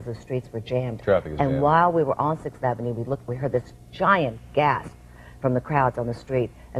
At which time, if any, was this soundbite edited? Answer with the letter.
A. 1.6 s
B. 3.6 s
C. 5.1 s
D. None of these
B